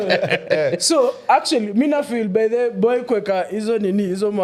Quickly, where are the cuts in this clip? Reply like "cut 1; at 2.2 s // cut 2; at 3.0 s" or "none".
none